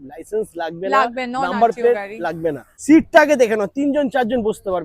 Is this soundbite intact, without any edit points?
no; 1 cut; at 2.7 s

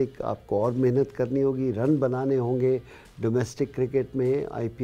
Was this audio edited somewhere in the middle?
no; 0 cuts

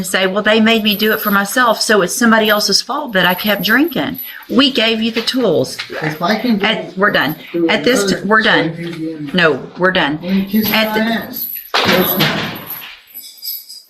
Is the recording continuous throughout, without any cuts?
yes; 0 cuts

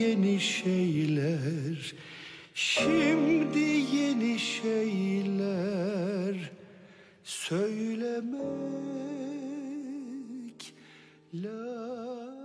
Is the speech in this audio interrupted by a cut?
no; 0 cuts

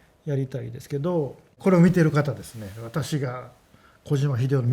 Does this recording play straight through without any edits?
no; 1 cut; at 1.5 s

